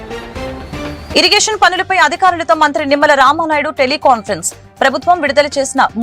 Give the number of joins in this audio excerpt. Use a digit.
1